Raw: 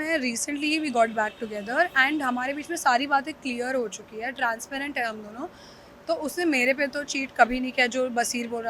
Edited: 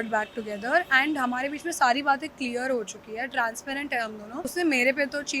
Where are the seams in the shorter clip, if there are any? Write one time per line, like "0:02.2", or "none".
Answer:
0:04.5